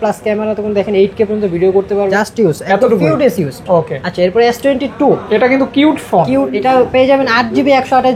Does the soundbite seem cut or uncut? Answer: cut